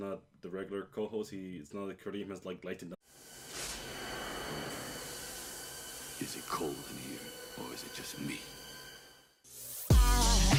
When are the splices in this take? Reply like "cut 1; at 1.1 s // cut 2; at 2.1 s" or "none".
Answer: none